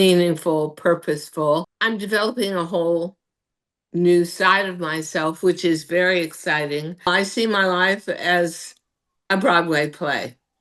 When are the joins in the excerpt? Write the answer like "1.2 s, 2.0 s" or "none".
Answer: 1.7 s, 7.1 s